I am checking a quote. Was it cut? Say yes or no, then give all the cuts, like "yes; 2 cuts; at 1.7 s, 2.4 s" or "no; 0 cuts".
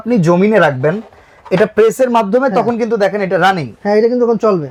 no; 0 cuts